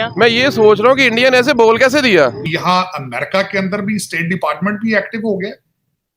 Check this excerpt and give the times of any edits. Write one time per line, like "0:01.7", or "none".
0:02.5